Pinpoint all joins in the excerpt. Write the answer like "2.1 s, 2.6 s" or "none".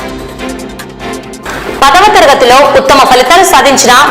1.2 s